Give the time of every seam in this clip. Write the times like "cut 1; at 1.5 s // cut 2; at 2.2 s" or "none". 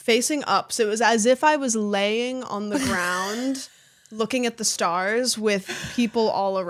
none